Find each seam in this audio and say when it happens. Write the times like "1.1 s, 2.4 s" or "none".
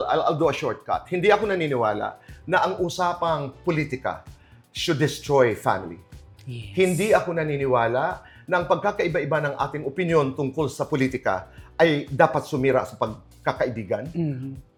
none